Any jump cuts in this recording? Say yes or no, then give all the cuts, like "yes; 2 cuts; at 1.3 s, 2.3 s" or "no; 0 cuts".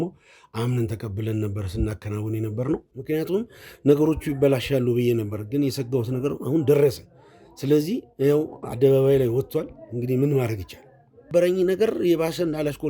yes; 2 cuts; at 2.9 s, 11.3 s